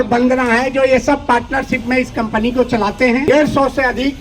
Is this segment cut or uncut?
cut